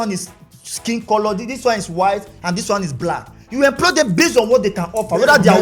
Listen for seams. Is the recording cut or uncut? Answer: uncut